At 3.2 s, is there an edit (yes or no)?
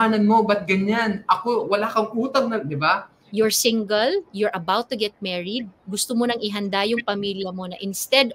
yes